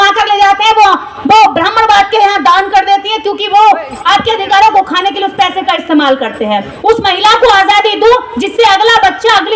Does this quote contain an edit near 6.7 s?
yes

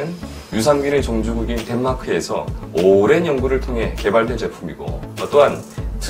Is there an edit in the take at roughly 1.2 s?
no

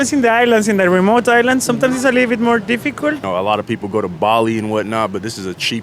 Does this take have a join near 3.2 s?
yes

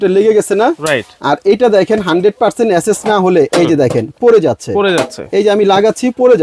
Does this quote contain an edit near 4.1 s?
no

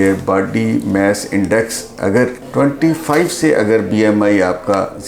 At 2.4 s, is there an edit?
yes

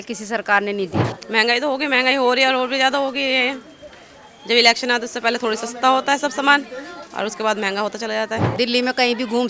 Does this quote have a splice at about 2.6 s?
no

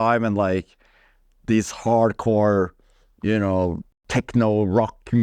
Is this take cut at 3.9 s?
yes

